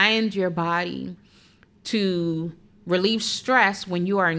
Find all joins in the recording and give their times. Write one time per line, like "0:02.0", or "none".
none